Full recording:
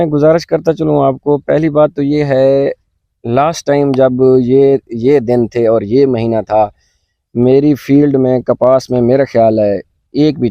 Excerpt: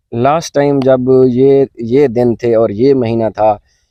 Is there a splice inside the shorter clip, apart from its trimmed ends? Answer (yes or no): no